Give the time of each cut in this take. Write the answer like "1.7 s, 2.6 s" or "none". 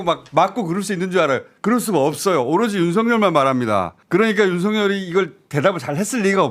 none